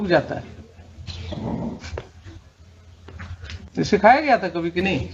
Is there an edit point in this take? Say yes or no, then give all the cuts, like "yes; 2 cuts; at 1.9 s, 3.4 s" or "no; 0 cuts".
no; 0 cuts